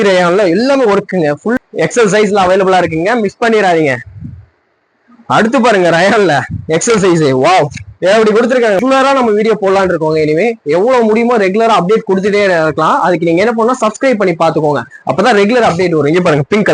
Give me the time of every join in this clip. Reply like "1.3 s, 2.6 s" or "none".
1.6 s, 8.8 s